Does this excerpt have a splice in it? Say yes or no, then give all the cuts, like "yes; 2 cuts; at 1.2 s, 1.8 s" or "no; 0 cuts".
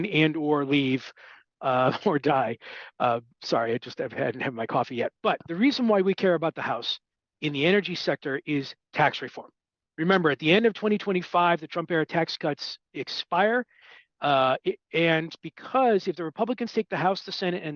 no; 0 cuts